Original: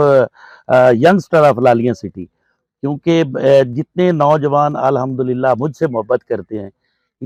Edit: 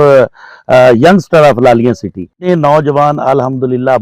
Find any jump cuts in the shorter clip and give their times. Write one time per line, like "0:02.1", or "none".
0:02.3